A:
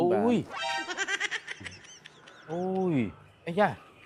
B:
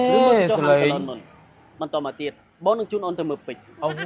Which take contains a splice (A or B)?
B